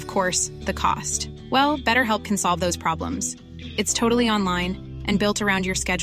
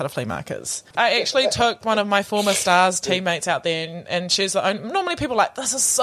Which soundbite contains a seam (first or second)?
second